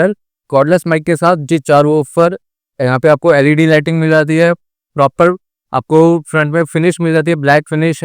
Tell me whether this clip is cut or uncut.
cut